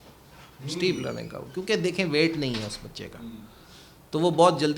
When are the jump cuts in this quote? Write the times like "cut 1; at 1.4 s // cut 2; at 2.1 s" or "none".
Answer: none